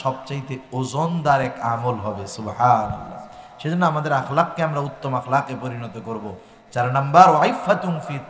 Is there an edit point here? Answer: no; 0 cuts

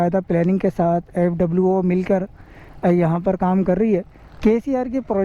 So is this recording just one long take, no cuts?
no; 1 cut; at 4.2 s

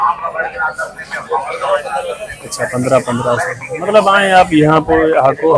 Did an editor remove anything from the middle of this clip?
no; 0 cuts

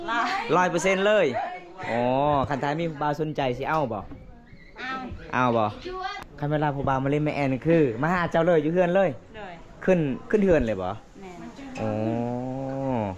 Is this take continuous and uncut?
no; 1 cut; at 6.1 s

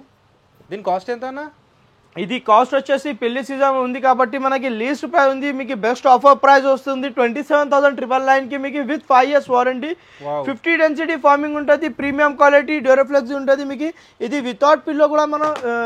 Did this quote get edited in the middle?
no; 0 cuts

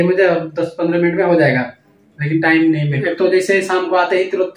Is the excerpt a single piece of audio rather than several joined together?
yes; 0 cuts

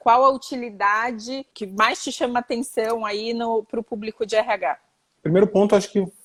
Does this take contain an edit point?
no; 0 cuts

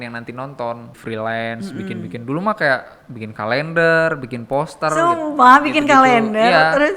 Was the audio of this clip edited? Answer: yes; 1 cut; at 0.9 s

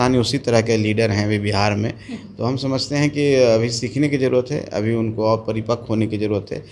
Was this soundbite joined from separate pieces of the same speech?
no; 0 cuts

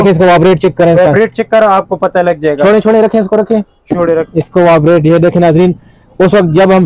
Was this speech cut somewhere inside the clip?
no; 0 cuts

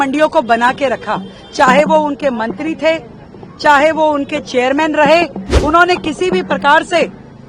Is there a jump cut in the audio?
yes; 1 cut; at 5.5 s

